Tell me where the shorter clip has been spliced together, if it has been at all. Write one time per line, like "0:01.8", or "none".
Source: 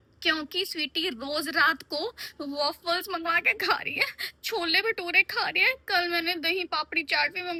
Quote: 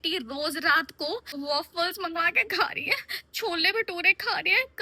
0:01.3